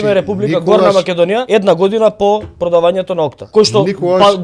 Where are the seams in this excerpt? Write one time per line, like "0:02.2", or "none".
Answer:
0:01.4
0:03.4